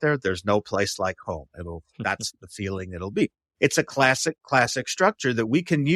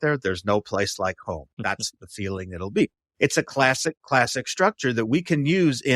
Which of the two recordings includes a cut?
second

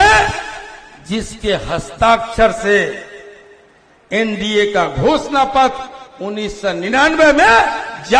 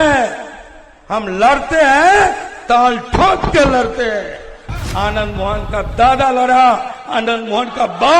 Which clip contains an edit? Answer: second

